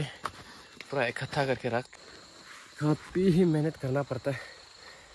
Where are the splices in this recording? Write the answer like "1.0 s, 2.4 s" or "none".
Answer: 1.9 s